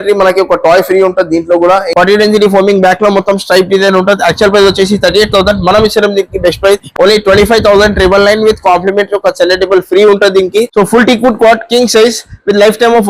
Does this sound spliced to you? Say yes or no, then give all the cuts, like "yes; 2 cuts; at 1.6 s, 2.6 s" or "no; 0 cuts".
yes; 2 cuts; at 1.9 s, 10.7 s